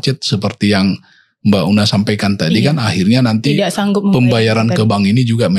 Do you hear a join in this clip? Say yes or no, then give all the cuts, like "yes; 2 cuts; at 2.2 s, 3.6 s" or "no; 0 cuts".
no; 0 cuts